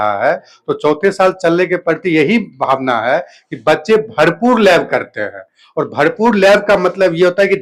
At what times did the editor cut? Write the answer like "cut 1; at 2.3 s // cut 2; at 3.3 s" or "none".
none